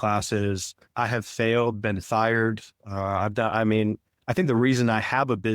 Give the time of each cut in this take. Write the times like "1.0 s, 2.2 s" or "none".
0.9 s